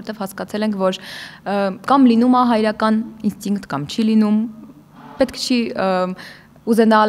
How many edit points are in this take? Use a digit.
0